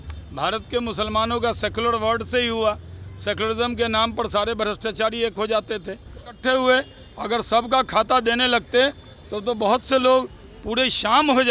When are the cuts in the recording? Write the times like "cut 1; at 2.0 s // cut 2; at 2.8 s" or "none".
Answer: cut 1; at 6.4 s